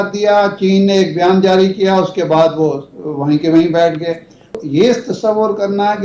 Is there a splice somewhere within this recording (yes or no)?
yes